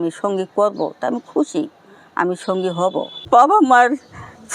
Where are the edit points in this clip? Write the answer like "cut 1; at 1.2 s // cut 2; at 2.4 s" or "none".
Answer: cut 1; at 3.2 s